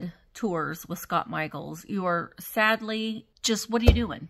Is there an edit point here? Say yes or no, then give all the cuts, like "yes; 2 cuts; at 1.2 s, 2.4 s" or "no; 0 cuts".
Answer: yes; 1 cut; at 3.3 s